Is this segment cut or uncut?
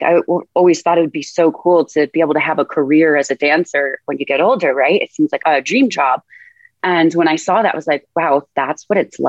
cut